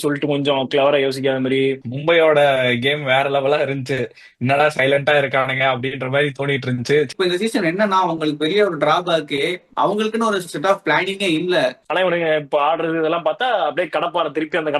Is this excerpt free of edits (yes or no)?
no